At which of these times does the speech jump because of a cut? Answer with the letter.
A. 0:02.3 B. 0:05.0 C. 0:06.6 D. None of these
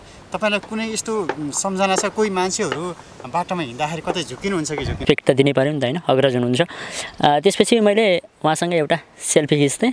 B